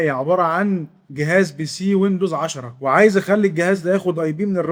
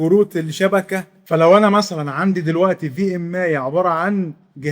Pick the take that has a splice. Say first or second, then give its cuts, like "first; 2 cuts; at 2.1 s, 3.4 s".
second; 1 cut; at 1.1 s